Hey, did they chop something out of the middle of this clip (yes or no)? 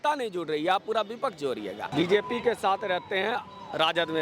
yes